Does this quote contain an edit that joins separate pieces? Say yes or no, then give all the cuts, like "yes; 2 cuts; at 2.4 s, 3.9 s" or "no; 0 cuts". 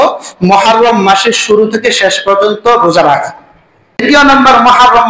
yes; 1 cut; at 4.0 s